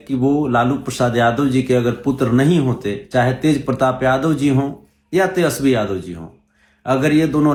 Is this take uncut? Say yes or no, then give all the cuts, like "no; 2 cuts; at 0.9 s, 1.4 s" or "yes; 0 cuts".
yes; 0 cuts